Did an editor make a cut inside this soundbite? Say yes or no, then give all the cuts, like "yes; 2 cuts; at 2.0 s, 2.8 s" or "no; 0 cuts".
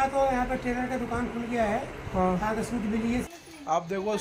yes; 1 cut; at 3.3 s